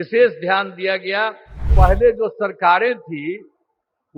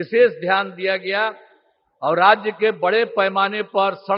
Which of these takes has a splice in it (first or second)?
first